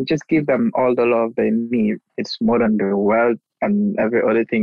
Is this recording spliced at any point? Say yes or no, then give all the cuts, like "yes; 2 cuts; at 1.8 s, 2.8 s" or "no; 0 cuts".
no; 0 cuts